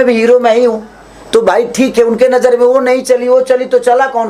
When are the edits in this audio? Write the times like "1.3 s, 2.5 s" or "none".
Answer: none